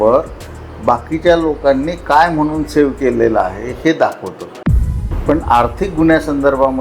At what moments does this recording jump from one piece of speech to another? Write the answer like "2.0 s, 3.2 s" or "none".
4.7 s